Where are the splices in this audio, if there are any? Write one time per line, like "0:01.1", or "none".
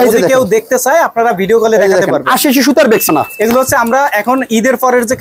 0:03.1